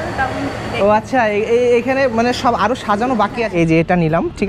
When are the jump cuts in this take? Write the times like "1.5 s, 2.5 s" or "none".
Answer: 3.4 s